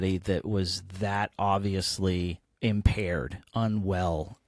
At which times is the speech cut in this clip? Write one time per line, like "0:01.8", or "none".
0:02.4